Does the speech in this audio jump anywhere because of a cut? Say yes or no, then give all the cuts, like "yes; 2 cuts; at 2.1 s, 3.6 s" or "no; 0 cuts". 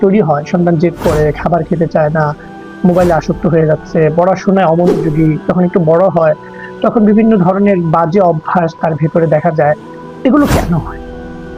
no; 0 cuts